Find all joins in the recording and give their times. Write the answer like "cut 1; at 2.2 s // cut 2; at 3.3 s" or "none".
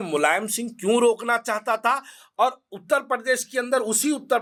none